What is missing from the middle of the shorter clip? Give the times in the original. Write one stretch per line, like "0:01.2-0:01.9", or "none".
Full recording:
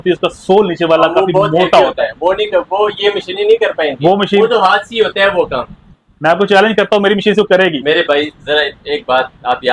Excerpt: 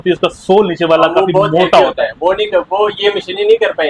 none